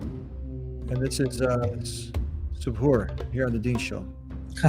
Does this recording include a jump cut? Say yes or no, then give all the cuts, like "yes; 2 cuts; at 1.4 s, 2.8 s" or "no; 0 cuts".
no; 0 cuts